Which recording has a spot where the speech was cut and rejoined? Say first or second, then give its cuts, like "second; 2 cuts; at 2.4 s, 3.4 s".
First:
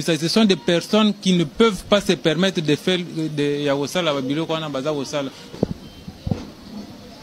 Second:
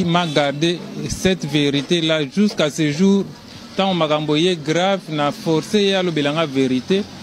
first; 1 cut; at 5.5 s